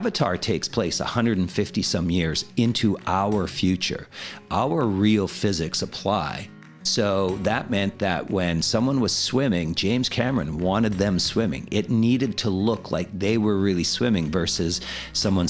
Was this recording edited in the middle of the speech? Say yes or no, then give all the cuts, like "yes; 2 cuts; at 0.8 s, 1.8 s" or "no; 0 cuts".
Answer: no; 0 cuts